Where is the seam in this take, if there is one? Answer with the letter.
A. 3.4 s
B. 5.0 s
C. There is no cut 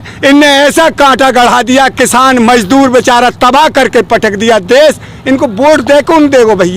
C